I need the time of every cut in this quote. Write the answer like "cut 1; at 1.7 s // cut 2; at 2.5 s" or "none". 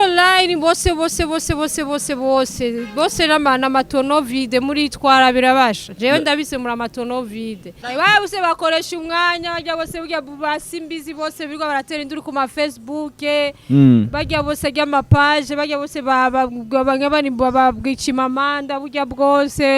cut 1; at 7.8 s